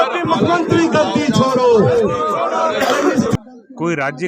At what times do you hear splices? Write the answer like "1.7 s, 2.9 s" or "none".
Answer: 3.4 s